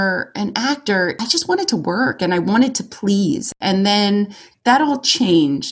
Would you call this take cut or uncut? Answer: cut